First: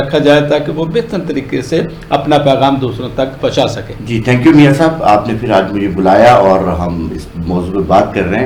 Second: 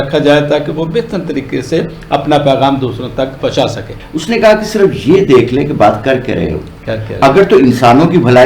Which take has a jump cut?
second; 1 cut; at 3.9 s

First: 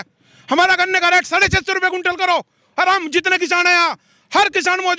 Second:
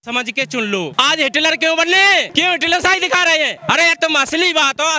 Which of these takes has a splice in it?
second; 3 cuts; at 0.9 s, 2.3 s, 3.6 s

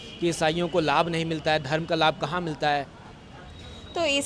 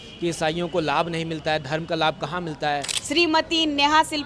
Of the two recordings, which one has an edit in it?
second; 1 cut; at 3.0 s

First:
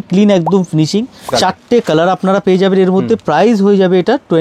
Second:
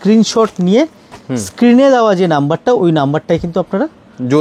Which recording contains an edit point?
first; 2 cuts; at 1.3 s, 3.2 s

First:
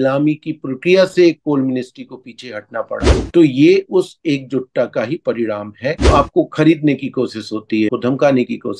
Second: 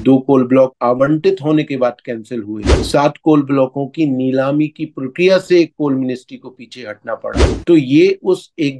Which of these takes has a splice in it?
first; 2 cuts; at 6.0 s, 7.9 s

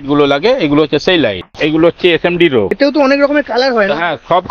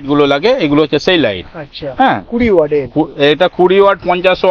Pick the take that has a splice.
first; 2 cuts; at 1.5 s, 2.8 s

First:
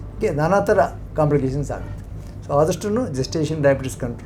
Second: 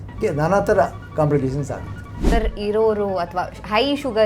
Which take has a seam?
second; 1 cut; at 2.3 s

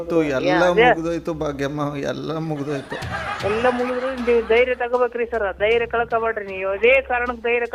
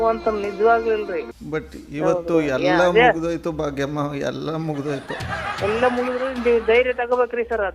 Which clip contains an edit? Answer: second; 1 cut; at 1.2 s

